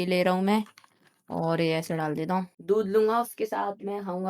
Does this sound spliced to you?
yes; 1 cut; at 2.6 s

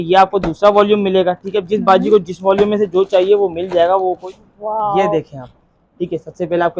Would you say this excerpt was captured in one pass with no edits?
no; 1 cut; at 4.2 s

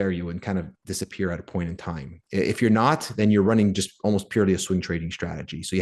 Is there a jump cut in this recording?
no; 0 cuts

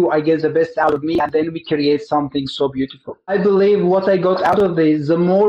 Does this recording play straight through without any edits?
no; 1 cut; at 3.3 s

